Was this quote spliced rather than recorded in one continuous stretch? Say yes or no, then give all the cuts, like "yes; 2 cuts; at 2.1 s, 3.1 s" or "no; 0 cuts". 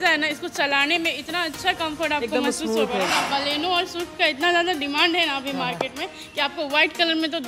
yes; 1 cut; at 3.1 s